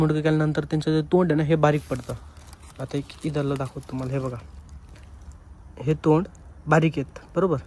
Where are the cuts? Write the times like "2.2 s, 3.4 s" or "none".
none